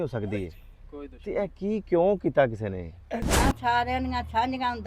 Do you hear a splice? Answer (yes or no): yes